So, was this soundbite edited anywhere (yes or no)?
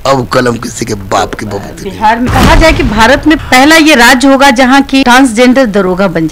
yes